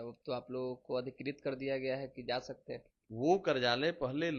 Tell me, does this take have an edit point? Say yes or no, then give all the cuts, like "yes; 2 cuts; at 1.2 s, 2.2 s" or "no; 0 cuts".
yes; 1 cut; at 3.0 s